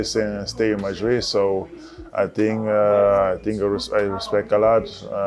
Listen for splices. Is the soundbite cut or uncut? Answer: uncut